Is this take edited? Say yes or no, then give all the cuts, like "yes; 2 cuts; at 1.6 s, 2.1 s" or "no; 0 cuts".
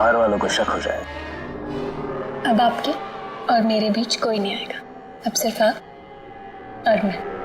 yes; 1 cut; at 1.5 s